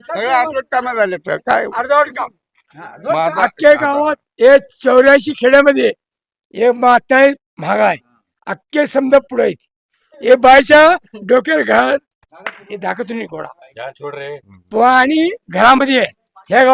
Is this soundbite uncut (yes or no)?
yes